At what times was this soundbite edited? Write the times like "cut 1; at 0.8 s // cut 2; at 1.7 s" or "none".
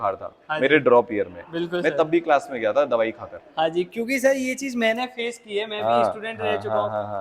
none